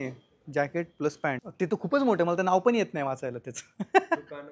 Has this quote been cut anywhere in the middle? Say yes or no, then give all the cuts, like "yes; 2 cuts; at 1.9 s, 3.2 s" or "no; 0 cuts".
yes; 1 cut; at 1.5 s